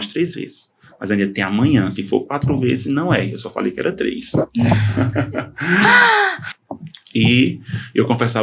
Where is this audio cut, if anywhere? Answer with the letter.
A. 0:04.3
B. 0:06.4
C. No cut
B